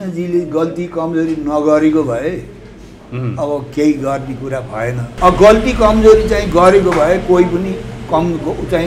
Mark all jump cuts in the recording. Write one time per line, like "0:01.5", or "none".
0:05.1